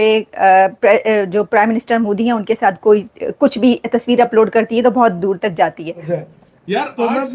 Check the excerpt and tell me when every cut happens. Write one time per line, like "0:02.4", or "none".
0:06.0